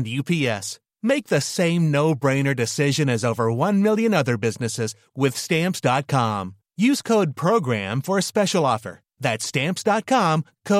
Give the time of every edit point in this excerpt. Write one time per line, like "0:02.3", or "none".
none